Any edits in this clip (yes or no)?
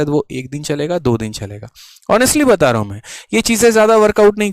no